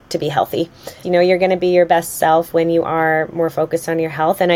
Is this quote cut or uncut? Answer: cut